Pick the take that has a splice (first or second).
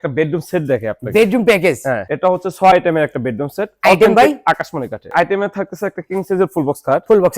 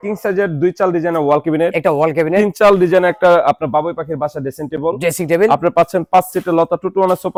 first